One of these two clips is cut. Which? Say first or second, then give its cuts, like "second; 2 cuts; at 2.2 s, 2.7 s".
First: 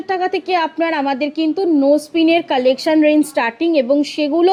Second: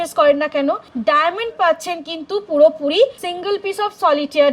second; 2 cuts; at 0.9 s, 3.3 s